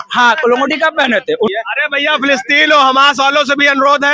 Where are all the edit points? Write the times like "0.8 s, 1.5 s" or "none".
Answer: 1.5 s